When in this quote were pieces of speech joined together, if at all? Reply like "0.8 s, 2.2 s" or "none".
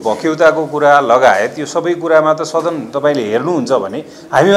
none

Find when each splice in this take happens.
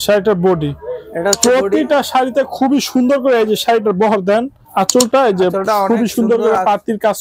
4.6 s

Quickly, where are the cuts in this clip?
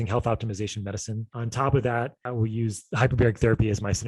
1.4 s, 2.2 s

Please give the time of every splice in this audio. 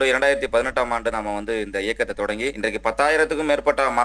2.6 s

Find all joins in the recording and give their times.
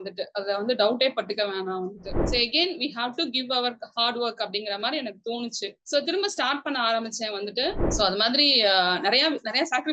2.2 s, 7.8 s

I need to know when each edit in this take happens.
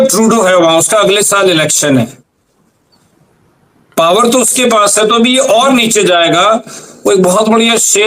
none

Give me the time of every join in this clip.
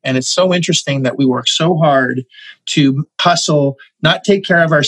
3.1 s

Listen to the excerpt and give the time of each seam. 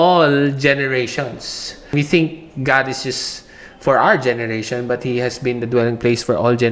1.9 s

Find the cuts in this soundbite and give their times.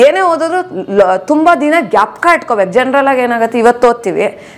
none

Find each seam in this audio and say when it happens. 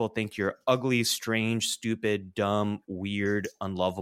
none

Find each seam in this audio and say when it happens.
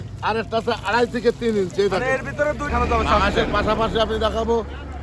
2.7 s

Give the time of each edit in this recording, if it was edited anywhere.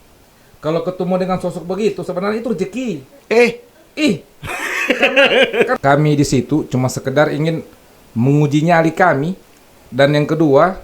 5.7 s, 9.3 s

